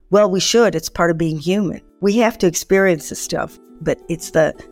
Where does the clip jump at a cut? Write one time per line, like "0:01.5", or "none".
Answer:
0:01.9
0:03.6